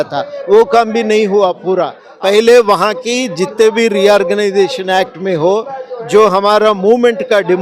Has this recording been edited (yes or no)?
yes